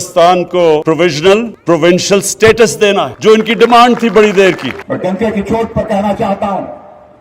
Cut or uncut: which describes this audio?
cut